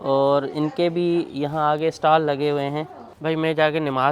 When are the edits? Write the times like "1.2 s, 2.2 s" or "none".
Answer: 3.0 s